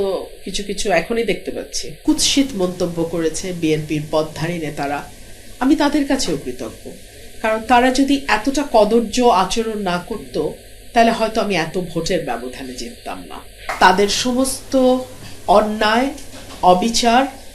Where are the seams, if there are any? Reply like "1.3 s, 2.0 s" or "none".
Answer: 1.9 s, 13.6 s